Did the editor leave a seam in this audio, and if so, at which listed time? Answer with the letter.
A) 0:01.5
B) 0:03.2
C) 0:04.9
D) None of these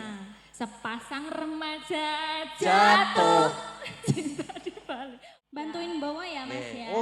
C